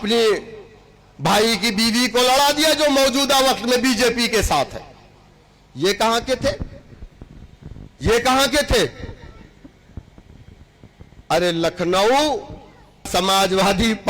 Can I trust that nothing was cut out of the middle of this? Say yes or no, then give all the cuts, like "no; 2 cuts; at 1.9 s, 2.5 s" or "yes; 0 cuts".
no; 1 cut; at 13.1 s